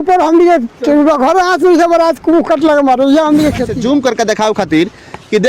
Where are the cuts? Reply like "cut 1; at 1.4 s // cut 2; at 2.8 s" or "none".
cut 1; at 3.7 s